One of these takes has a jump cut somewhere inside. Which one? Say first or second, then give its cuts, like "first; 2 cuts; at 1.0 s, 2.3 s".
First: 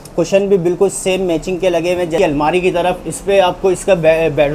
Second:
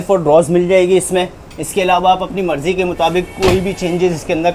first; 1 cut; at 2.1 s